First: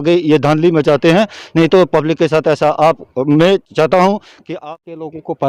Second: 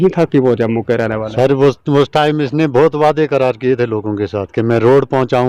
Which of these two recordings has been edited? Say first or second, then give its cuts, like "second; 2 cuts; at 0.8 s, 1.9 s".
first; 1 cut; at 4.5 s